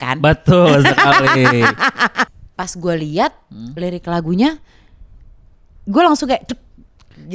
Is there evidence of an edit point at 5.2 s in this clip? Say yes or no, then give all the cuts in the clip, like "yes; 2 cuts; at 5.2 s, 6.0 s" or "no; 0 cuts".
no; 1 cut; at 2.4 s